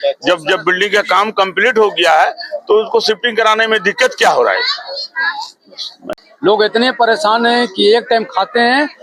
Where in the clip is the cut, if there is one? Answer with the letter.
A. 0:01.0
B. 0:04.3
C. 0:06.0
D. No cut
C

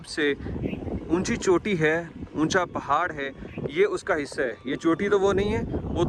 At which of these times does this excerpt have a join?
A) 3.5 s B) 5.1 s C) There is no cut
C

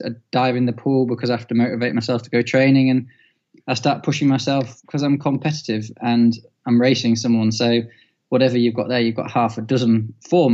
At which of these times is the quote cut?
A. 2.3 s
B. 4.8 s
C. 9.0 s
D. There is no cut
D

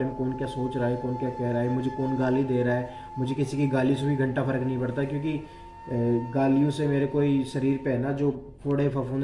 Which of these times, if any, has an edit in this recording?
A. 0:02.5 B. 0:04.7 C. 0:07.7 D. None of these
D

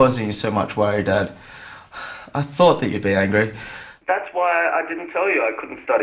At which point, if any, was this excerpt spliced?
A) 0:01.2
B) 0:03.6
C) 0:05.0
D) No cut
A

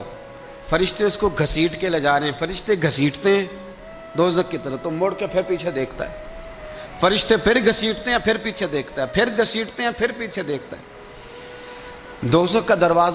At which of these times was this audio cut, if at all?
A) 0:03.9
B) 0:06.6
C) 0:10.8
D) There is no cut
D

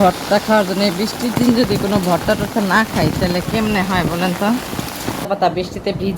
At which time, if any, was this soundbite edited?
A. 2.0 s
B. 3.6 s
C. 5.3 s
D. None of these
C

